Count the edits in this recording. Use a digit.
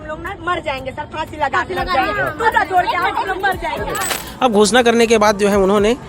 1